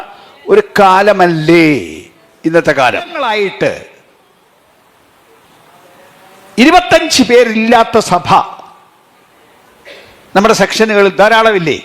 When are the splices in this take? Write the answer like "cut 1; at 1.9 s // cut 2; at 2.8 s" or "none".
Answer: cut 1; at 3.1 s